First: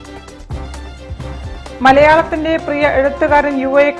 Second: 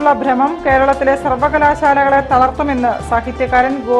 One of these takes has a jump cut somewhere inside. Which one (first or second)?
first